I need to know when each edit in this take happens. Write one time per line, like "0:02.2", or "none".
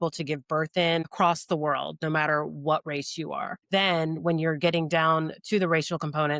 0:01.1
0:03.5